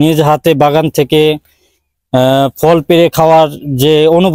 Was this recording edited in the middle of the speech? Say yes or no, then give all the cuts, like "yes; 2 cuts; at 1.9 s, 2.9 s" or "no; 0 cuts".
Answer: no; 0 cuts